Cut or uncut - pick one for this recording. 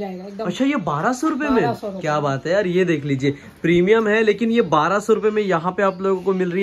uncut